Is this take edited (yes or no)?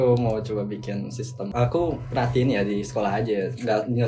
yes